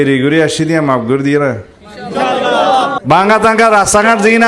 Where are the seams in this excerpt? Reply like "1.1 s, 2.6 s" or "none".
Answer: 3.0 s